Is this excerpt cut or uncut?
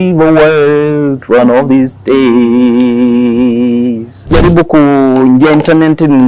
cut